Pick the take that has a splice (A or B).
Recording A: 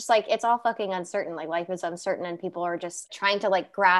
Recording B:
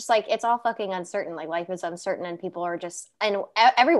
A